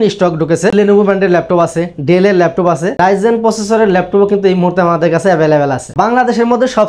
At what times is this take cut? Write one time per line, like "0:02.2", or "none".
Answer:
0:00.7
0:02.9
0:05.8